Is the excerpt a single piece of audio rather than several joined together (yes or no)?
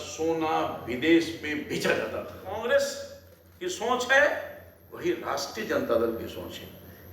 no